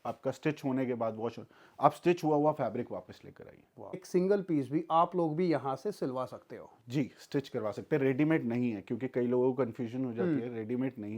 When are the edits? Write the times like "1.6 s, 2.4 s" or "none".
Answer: 4.0 s